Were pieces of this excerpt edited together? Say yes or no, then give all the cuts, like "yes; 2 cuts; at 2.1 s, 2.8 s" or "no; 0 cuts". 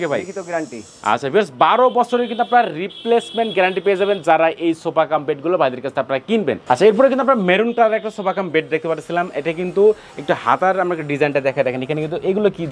no; 0 cuts